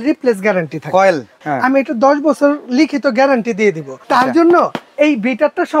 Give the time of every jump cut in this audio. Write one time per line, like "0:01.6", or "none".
0:01.4
0:03.9